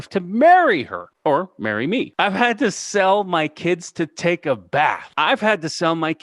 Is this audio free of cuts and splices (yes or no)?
no